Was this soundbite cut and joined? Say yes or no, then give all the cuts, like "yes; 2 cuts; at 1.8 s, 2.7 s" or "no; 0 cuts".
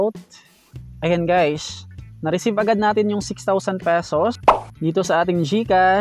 yes; 1 cut; at 4.4 s